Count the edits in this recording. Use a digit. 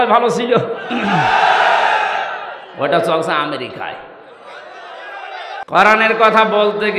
1